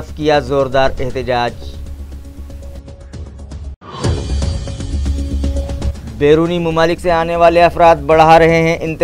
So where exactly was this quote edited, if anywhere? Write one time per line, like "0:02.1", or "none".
0:01.7
0:03.7
0:06.0